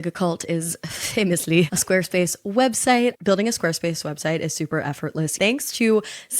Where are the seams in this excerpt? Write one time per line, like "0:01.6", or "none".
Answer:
0:05.3